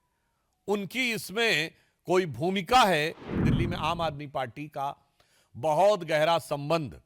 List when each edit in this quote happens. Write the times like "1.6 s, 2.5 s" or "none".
3.4 s